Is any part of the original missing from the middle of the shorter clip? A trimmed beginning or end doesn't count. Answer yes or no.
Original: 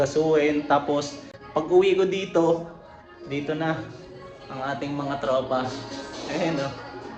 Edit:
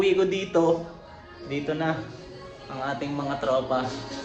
no